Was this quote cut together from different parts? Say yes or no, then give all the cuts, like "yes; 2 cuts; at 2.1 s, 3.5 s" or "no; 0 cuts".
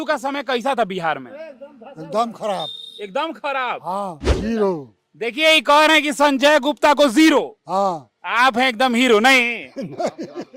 yes; 1 cut; at 4.3 s